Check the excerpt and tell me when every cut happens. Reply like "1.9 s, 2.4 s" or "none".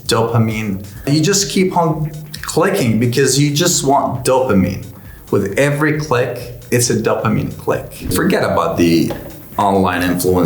1.1 s, 8.1 s